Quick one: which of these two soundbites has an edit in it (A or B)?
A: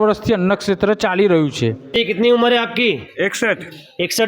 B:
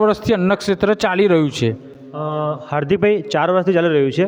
A